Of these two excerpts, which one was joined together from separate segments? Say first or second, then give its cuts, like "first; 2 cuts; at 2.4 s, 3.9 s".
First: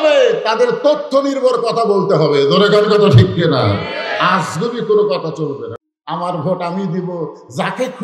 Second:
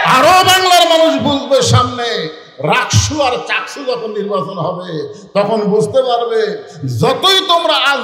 first; 1 cut; at 5.7 s